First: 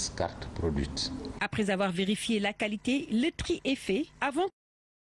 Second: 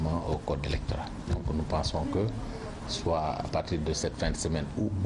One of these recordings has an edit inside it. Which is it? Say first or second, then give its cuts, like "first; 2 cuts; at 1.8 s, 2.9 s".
first; 1 cut; at 4.0 s